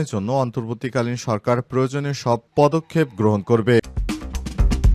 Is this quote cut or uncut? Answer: cut